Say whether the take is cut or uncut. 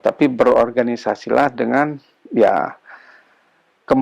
uncut